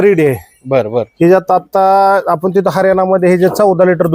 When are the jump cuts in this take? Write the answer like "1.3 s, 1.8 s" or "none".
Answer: none